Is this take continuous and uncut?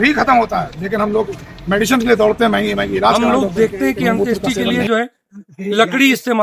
no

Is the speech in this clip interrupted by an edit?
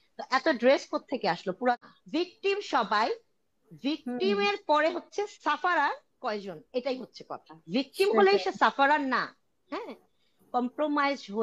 yes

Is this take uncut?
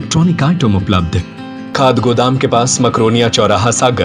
no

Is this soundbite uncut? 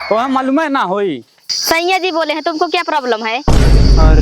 no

